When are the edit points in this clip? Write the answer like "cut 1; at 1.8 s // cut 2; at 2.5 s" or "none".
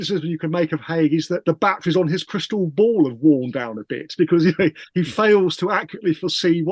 cut 1; at 1.4 s